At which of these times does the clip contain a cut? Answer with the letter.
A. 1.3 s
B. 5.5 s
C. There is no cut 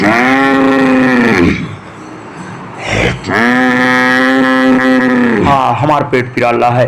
B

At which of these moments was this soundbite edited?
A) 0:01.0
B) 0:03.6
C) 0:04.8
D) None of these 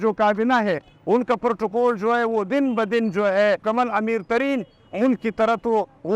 B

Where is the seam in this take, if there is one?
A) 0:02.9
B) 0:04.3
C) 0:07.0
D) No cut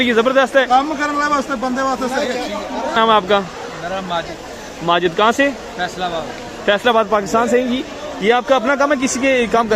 A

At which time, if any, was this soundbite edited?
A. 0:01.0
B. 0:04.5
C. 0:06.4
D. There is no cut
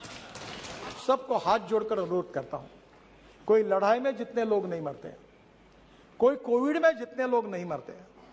A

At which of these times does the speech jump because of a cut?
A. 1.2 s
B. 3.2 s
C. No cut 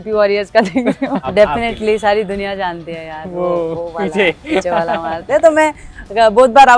A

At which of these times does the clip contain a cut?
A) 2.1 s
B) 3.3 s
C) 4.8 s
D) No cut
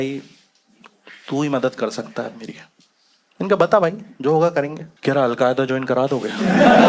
C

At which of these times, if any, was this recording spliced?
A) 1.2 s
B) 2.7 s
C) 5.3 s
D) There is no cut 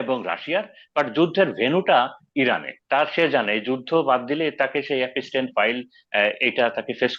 B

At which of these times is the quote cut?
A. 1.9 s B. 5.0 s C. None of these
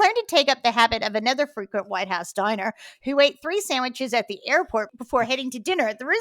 B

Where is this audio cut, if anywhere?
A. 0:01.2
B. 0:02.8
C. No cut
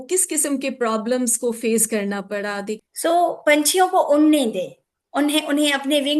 B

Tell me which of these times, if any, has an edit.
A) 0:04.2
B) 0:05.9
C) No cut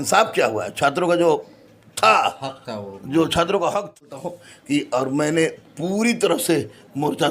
A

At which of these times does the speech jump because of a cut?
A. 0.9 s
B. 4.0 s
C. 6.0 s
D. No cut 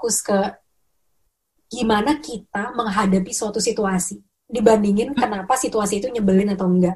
D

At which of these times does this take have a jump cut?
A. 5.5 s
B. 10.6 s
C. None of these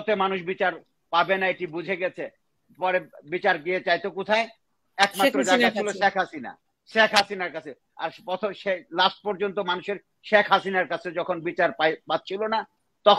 C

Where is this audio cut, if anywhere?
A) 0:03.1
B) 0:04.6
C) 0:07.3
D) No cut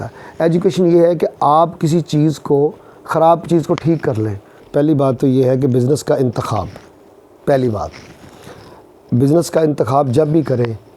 B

